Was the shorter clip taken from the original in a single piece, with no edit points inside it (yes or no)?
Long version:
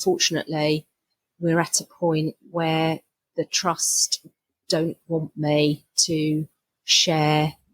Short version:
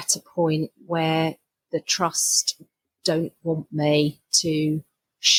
yes